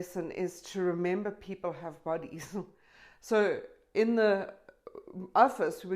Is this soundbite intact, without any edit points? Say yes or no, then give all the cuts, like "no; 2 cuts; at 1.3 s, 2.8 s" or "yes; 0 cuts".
no; 1 cut; at 2.8 s